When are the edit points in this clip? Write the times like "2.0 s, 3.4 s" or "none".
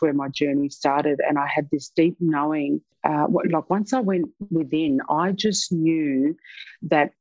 2.9 s